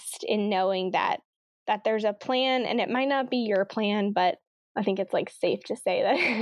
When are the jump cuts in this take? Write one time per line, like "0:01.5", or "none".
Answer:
0:04.6